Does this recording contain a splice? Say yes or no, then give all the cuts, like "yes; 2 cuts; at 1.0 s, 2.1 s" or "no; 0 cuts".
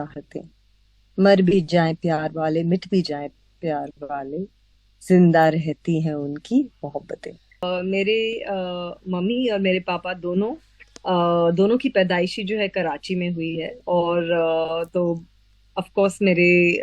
yes; 1 cut; at 7.6 s